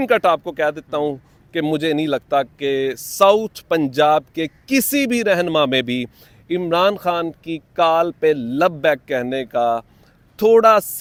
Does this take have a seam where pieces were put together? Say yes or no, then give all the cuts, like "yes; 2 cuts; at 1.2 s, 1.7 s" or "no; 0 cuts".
no; 0 cuts